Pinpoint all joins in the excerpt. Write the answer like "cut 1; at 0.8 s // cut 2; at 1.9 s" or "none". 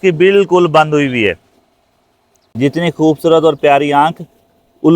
cut 1; at 2.4 s